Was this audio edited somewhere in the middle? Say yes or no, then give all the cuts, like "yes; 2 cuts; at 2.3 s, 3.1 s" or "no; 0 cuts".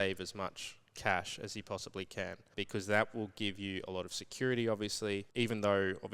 yes; 2 cuts; at 2.4 s, 5.3 s